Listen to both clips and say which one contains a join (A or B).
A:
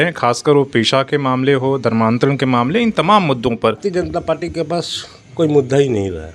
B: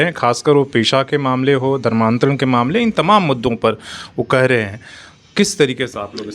A